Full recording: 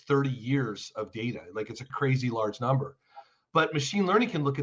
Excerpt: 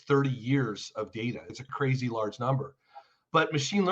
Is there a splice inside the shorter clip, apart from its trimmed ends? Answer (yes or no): yes